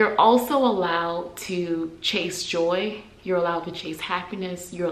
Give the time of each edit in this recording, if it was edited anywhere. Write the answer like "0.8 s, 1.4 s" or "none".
none